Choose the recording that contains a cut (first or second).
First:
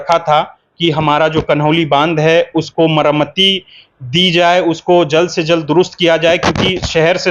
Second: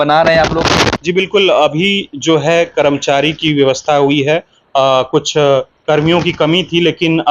second